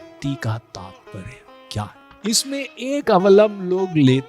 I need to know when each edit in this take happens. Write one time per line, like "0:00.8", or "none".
0:02.0

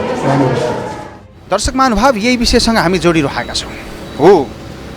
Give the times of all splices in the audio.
none

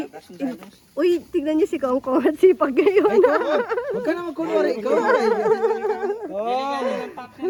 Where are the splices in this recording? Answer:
none

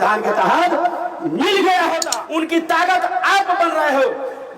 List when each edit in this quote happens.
0:02.1

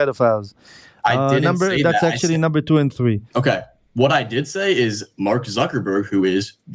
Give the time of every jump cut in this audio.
0:03.2

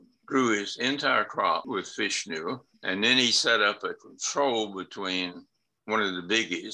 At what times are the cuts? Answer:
0:01.6
0:02.7

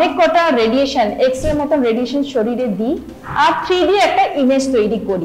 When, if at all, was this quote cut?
none

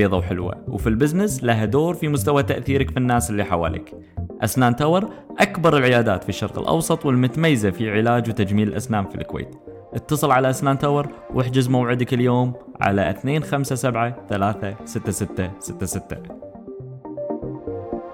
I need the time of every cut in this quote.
0:16.2

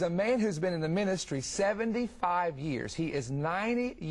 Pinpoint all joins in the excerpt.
0:02.9

